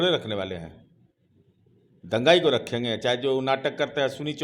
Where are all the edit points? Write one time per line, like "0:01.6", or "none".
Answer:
none